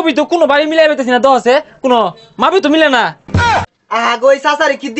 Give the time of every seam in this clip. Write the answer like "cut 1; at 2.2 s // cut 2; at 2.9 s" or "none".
cut 1; at 3.6 s